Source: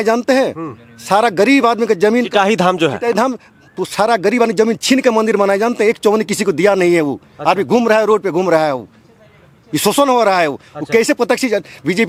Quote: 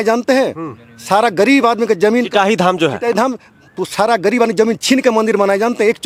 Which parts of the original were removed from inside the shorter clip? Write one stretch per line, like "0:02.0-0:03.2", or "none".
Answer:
none